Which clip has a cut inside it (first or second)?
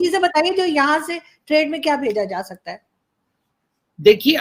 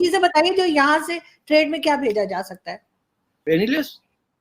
second